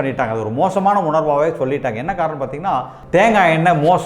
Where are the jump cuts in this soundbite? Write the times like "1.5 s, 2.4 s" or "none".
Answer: 3.0 s

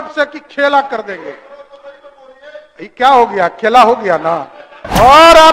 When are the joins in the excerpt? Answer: none

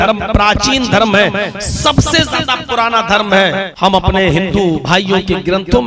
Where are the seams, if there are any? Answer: 3.7 s, 4.8 s

